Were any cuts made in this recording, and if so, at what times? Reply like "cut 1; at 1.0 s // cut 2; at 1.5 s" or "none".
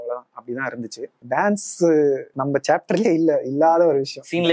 cut 1; at 1.1 s